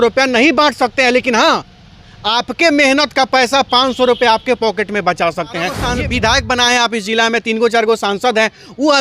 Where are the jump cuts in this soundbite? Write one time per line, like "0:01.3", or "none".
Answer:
0:05.8